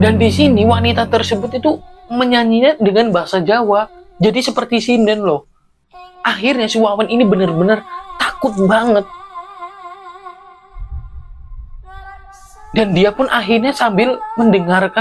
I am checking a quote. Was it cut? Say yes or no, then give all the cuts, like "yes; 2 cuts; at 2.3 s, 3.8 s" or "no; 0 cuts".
no; 0 cuts